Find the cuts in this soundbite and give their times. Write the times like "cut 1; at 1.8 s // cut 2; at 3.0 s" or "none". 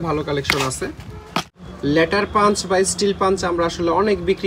cut 1; at 1.6 s

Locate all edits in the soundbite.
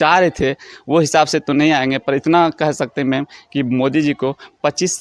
none

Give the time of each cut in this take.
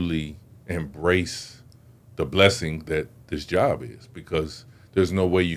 none

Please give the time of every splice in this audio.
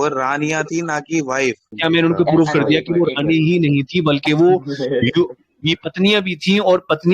cut 1; at 1.7 s

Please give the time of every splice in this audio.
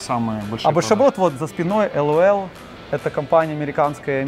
none

